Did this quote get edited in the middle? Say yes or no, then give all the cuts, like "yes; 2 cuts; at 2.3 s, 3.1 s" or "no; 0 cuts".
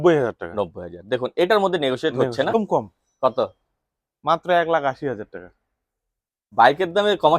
yes; 1 cut; at 2.6 s